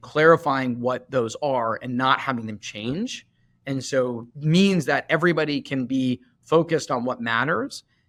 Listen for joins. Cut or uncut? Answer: uncut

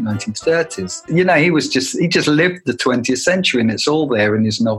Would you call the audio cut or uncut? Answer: cut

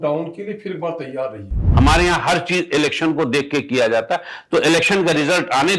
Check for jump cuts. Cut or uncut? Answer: cut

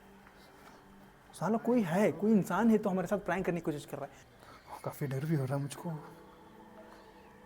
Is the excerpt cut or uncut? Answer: cut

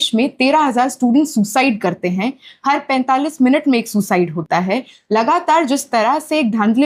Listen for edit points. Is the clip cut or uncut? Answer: uncut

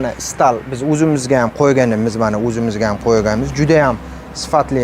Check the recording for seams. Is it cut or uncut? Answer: uncut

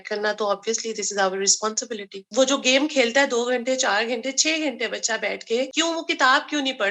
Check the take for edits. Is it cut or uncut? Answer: cut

